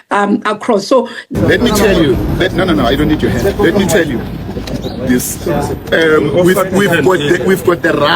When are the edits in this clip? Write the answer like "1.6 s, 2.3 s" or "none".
1.3 s

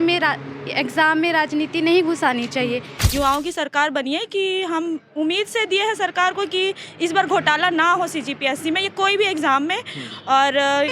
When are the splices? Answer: 3.1 s

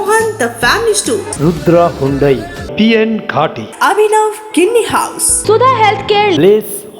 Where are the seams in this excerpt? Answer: 5.3 s

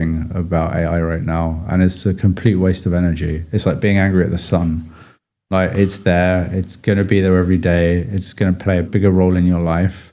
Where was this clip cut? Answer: 8.9 s

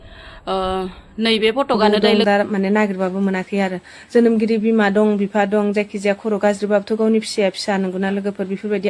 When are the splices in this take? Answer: 1.9 s

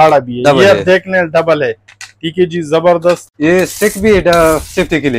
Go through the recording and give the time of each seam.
3.3 s

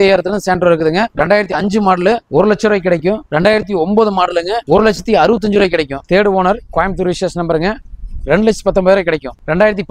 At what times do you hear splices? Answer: 1.1 s, 2.2 s, 3.2 s, 4.6 s, 6.0 s

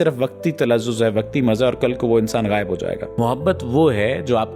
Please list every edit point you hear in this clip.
3.0 s

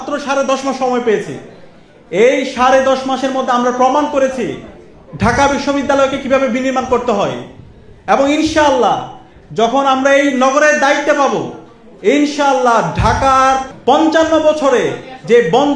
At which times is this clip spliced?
none

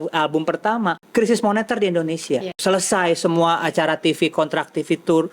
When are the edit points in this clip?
1.0 s, 2.6 s

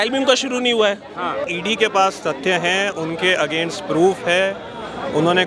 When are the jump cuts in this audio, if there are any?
1.5 s

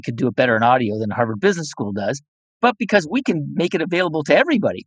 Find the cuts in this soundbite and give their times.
none

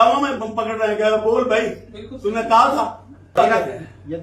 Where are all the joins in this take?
3.3 s

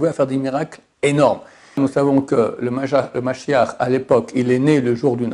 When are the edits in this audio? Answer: 1.8 s

